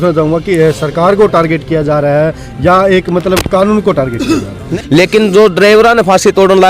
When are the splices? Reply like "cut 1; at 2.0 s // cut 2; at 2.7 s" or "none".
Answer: cut 1; at 4.7 s